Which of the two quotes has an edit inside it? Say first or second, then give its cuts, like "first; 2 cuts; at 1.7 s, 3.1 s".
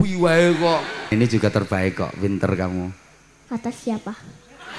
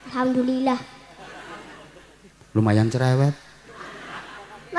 first; 1 cut; at 1.1 s